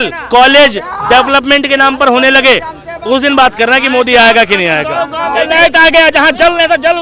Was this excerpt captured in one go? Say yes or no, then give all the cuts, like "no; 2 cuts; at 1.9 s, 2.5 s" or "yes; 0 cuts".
yes; 0 cuts